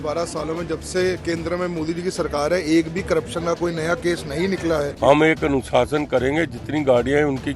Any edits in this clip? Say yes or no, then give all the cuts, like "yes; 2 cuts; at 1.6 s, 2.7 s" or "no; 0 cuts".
yes; 1 cut; at 4.9 s